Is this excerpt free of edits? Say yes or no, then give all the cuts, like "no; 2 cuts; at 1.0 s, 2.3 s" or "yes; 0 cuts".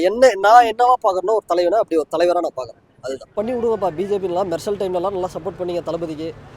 no; 1 cut; at 3.3 s